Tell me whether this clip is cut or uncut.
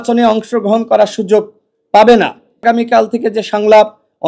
cut